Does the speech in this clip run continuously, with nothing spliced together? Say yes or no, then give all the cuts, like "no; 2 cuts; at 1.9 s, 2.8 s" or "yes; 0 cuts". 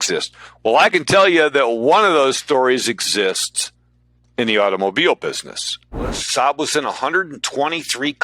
no; 1 cut; at 6.2 s